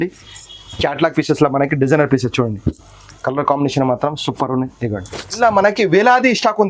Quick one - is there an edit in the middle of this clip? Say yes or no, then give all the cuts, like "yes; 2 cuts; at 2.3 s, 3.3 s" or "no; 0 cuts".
yes; 1 cut; at 5.4 s